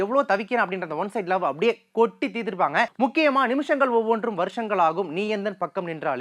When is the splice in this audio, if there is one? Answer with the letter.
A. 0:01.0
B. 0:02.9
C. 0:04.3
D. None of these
B